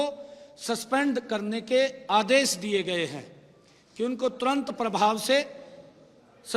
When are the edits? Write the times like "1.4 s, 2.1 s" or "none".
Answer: none